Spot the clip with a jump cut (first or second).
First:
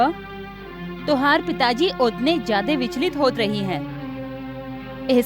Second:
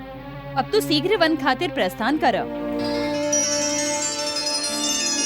second